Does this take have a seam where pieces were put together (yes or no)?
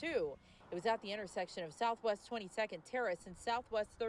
no